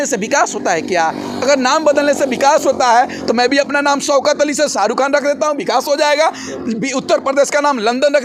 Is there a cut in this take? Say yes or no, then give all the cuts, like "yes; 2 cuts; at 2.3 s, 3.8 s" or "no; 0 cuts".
no; 0 cuts